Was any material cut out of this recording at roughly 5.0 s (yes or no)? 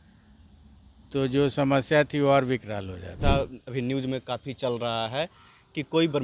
no